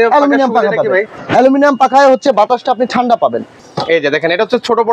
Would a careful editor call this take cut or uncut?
cut